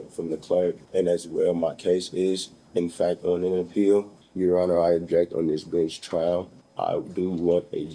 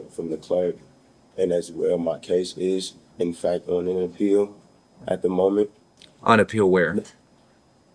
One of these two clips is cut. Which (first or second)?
first